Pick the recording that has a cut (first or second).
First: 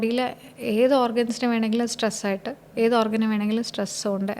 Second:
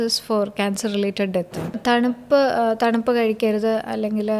second